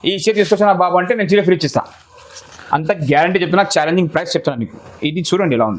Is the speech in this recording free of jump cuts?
yes; 0 cuts

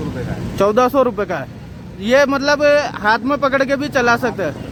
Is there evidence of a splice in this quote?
no; 0 cuts

